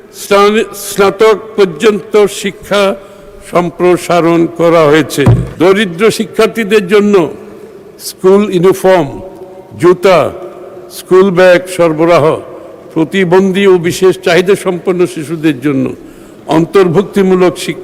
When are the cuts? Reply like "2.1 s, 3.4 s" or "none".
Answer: 5.4 s